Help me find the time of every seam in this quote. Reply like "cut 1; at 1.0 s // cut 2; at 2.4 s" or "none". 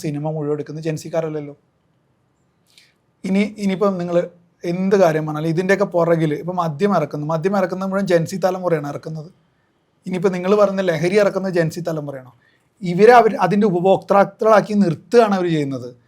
none